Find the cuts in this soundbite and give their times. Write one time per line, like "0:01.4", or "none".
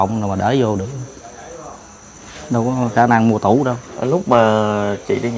none